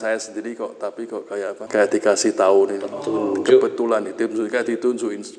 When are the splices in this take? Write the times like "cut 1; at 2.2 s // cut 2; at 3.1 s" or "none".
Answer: cut 1; at 1.6 s